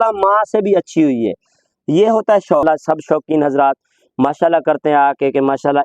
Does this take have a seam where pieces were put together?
yes; 1 cut; at 2.6 s

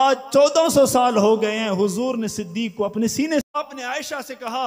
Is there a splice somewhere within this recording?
yes; 1 cut; at 3.4 s

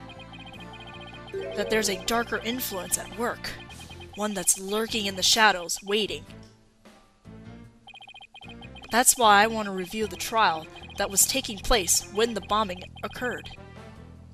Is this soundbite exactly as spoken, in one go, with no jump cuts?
yes; 0 cuts

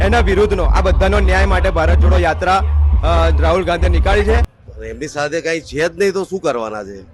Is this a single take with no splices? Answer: no; 1 cut; at 4.5 s

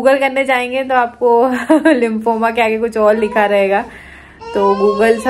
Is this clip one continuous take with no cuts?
yes; 0 cuts

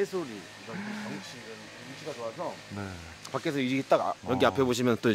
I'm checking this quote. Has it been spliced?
yes; 1 cut; at 4.1 s

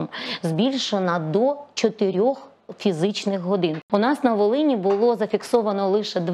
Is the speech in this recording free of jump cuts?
no; 1 cut; at 3.8 s

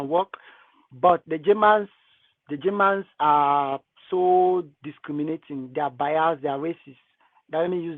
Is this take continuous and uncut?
yes; 0 cuts

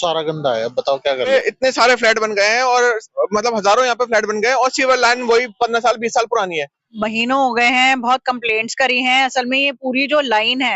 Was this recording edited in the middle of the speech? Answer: yes; 2 cuts; at 1.3 s, 6.9 s

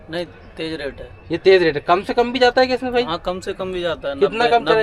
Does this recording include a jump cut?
no; 0 cuts

